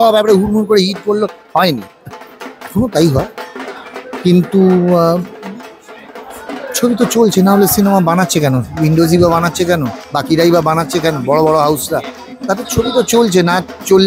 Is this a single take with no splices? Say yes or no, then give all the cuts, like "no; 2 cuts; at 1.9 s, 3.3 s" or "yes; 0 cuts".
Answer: yes; 0 cuts